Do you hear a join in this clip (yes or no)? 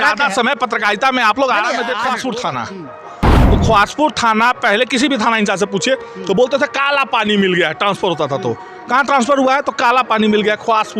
yes